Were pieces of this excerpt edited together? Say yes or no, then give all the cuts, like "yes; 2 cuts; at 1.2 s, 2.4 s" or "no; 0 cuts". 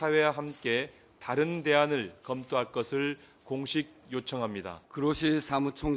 yes; 1 cut; at 4.8 s